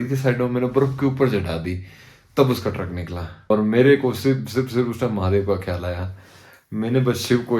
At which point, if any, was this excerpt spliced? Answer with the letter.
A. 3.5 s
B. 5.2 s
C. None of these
A